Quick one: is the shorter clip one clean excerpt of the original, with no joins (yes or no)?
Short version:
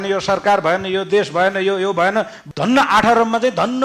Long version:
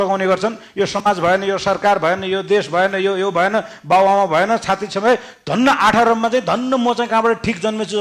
no